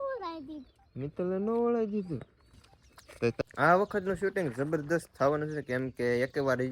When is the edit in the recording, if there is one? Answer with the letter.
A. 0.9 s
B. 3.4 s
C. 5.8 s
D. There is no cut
B